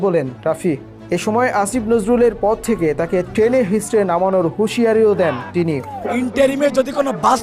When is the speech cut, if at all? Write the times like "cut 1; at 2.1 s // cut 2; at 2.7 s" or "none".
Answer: cut 1; at 6.0 s